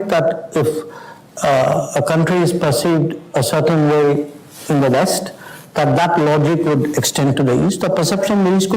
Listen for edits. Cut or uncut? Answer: uncut